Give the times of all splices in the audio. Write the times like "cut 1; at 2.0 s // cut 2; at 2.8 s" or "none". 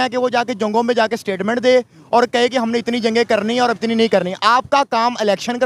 none